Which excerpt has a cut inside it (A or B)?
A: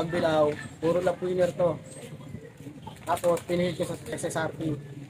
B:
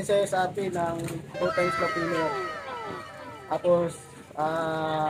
A